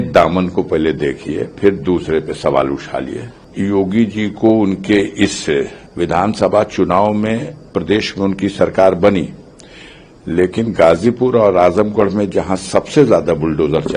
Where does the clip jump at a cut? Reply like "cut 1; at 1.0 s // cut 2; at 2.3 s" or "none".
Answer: cut 1; at 3.4 s // cut 2; at 5.8 s